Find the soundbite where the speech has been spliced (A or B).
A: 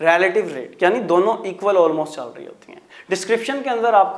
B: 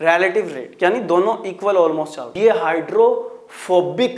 B